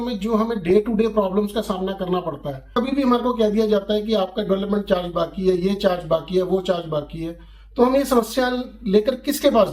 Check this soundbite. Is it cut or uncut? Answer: cut